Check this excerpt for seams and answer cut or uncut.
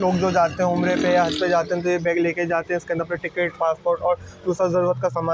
uncut